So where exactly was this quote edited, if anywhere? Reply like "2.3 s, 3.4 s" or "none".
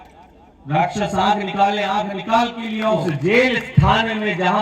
3.0 s